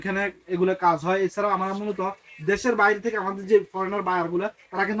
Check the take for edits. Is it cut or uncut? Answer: uncut